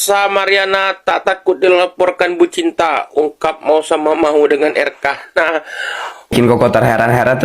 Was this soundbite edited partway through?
yes; 1 cut; at 6.3 s

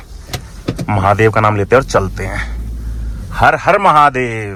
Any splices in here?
no; 0 cuts

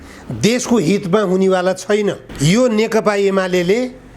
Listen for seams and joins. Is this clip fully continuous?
no; 1 cut; at 2.3 s

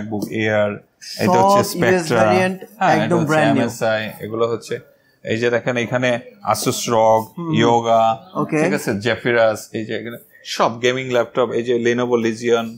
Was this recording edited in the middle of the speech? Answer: no; 0 cuts

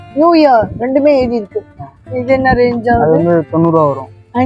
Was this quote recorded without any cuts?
yes; 0 cuts

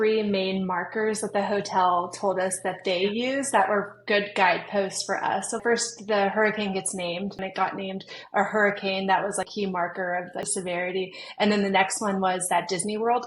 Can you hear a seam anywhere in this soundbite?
yes; 4 cuts; at 5.6 s, 7.4 s, 9.5 s, 10.5 s

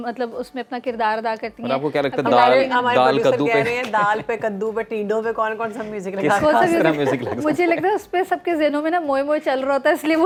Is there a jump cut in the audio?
no; 0 cuts

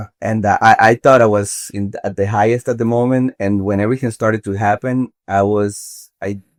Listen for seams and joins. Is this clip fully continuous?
yes; 0 cuts

